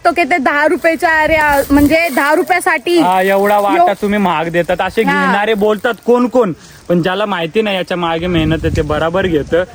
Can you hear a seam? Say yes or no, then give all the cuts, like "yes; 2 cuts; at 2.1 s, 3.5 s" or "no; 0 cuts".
no; 0 cuts